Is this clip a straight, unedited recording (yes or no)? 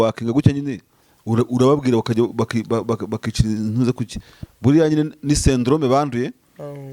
yes